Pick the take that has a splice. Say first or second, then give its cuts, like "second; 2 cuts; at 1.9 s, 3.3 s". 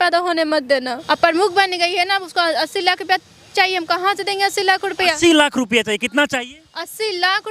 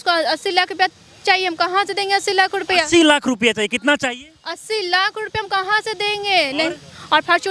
first; 1 cut; at 0.9 s